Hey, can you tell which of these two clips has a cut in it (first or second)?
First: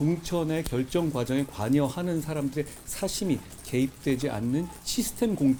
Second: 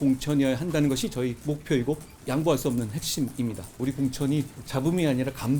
second